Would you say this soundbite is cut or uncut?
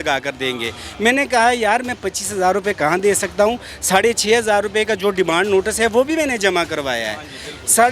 uncut